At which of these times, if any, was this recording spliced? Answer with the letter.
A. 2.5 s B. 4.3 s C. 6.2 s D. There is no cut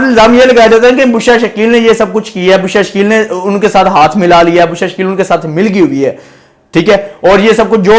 D